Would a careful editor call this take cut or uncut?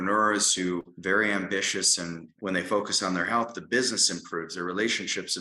cut